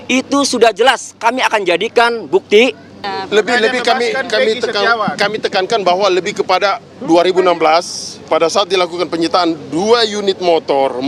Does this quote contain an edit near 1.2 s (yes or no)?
no